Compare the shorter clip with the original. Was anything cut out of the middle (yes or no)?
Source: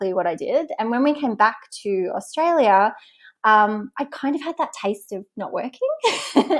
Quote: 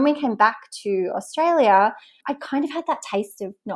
yes